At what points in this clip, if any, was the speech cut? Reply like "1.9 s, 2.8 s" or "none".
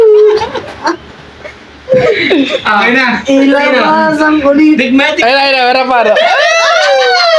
6.3 s